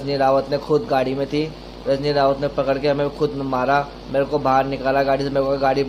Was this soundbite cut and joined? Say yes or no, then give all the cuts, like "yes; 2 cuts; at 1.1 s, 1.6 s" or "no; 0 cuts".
no; 0 cuts